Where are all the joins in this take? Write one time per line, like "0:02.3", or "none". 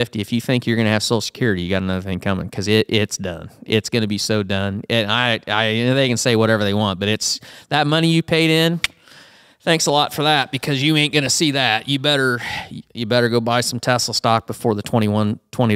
none